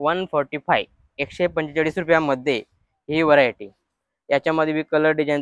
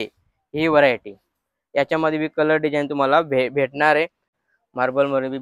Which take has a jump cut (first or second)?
second